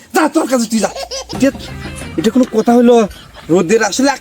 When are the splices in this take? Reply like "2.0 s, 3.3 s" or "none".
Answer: 1.4 s